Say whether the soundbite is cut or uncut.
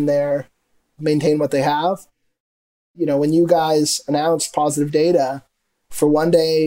cut